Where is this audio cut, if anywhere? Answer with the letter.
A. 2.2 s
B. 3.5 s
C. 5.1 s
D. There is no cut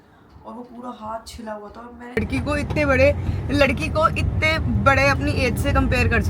A